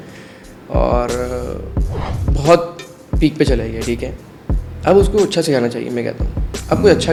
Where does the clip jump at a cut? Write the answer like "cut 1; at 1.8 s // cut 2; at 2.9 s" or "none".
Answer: none